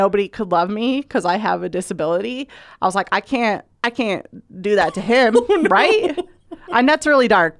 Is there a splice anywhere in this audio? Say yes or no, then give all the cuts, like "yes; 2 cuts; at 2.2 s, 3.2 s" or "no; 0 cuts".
yes; 1 cut; at 3.7 s